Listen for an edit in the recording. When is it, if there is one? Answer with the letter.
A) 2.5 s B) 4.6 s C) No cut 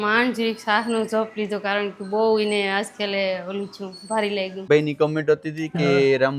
B